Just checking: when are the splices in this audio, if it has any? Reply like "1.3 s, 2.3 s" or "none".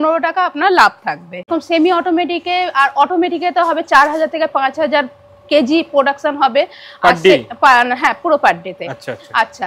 1.5 s